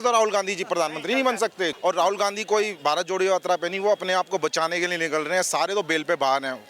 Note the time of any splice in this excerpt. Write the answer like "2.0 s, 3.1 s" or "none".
1.8 s